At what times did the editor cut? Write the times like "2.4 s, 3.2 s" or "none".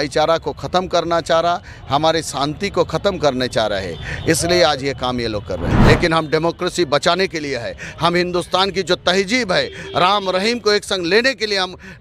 5.7 s